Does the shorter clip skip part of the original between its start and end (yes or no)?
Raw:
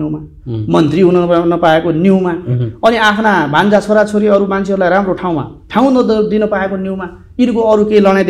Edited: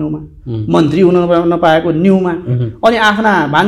no